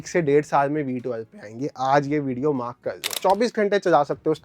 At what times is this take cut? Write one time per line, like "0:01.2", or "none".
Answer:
0:03.2